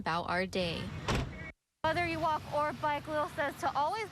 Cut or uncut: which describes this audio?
cut